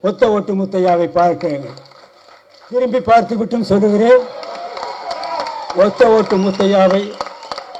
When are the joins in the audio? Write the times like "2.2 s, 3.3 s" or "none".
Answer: none